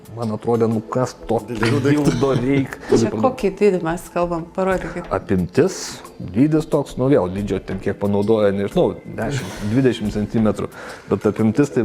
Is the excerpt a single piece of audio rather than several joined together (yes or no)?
no